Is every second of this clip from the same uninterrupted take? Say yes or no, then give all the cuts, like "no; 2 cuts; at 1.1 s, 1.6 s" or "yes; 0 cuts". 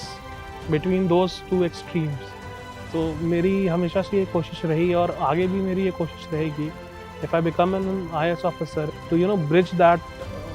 no; 1 cut; at 8.9 s